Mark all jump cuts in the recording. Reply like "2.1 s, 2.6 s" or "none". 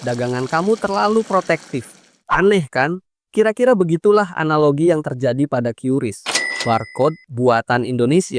none